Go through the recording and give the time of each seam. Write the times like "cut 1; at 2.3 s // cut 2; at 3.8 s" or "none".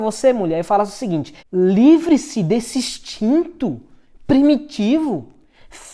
cut 1; at 1.4 s